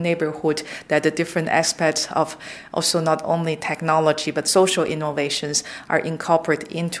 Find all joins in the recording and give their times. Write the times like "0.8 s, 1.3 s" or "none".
none